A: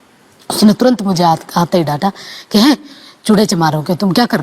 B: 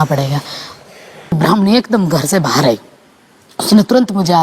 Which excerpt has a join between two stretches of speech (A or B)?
B